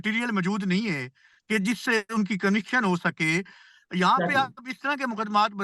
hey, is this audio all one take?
yes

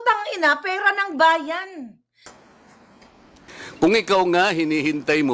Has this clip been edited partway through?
yes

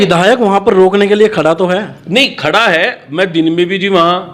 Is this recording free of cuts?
yes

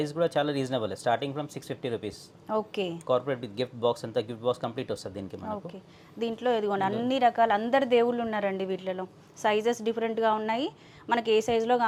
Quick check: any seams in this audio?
no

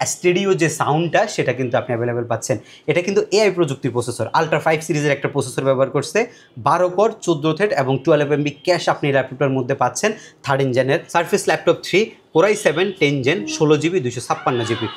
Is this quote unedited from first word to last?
no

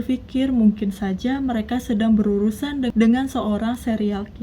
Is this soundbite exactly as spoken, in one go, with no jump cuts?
no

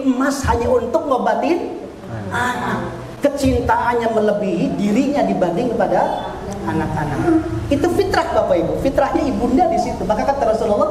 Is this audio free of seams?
yes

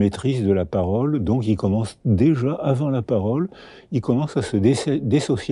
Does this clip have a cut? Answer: no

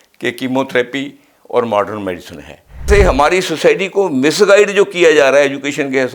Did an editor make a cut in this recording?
yes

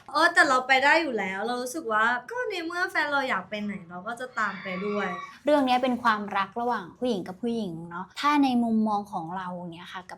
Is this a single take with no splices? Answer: no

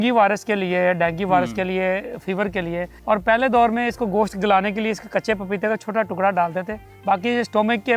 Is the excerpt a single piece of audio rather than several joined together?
no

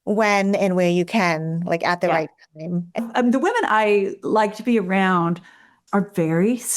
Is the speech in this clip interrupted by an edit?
yes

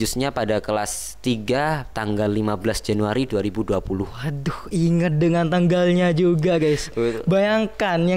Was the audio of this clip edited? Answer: no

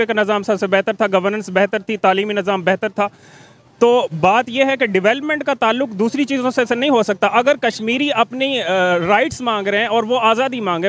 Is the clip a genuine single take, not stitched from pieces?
yes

